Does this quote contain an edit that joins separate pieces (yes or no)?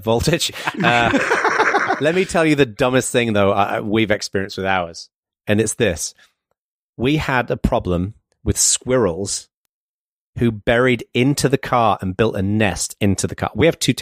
no